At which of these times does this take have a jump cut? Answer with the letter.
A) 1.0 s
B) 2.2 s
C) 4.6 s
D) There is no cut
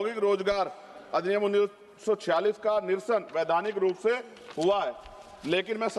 D